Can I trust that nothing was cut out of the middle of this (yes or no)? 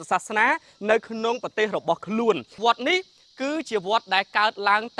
no